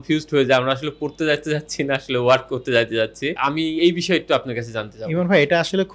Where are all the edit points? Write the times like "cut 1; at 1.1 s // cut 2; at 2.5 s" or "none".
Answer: none

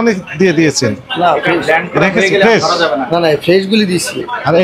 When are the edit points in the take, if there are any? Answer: none

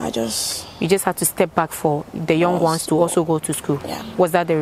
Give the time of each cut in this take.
none

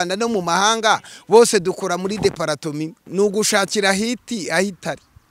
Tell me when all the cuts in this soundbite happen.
cut 1; at 3.0 s

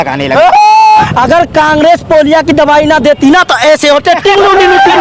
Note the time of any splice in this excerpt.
cut 1; at 1.1 s

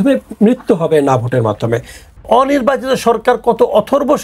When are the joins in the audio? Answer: cut 1; at 2.2 s

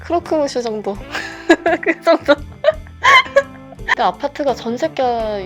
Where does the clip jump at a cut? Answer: cut 1; at 3.9 s

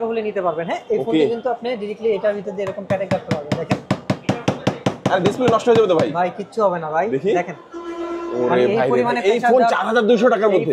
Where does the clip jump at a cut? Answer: none

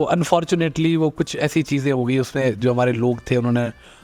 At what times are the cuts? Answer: none

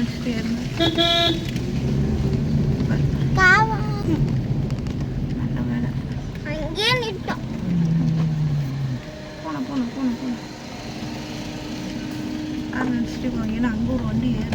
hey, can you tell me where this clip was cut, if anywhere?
none

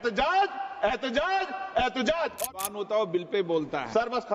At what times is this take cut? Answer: cut 1; at 2.6 s

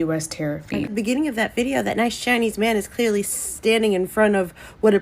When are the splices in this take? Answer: cut 1; at 0.9 s

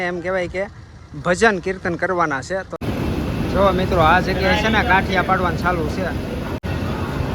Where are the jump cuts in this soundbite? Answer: cut 1; at 2.7 s // cut 2; at 6.6 s

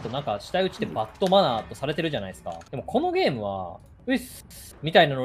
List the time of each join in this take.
none

